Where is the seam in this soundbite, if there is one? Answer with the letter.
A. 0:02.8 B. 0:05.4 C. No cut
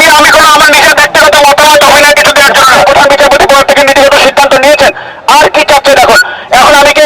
A